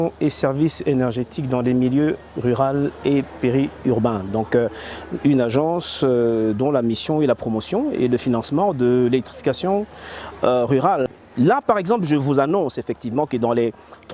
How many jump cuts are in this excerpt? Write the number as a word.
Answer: one